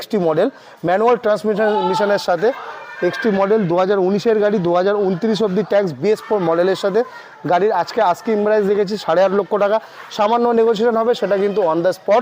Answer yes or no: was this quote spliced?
no